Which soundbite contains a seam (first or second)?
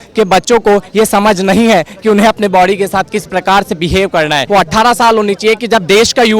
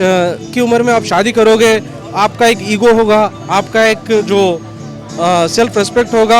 first